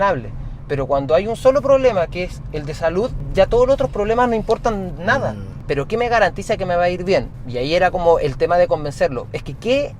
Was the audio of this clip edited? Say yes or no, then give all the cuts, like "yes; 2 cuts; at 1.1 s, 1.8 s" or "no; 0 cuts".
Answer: yes; 1 cut; at 5.6 s